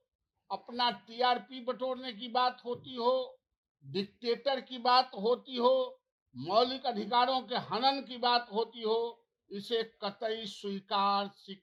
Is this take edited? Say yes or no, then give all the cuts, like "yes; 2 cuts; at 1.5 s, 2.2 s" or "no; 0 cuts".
no; 0 cuts